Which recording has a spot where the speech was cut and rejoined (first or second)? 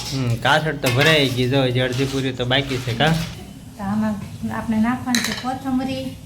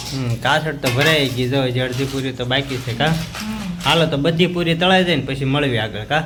first